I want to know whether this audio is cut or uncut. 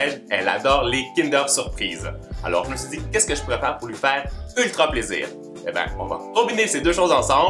cut